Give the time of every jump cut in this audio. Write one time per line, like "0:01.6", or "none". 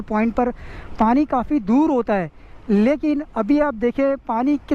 none